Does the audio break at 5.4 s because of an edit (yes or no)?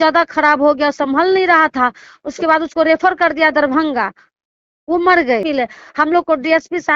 yes